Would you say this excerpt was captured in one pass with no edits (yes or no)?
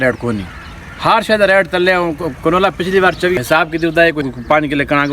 no